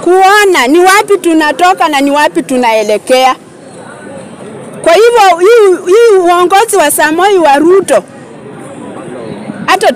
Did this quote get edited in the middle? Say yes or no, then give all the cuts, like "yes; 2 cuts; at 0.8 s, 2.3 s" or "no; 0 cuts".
no; 0 cuts